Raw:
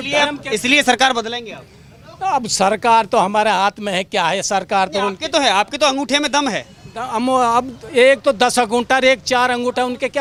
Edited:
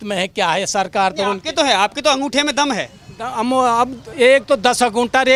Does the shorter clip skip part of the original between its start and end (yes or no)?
no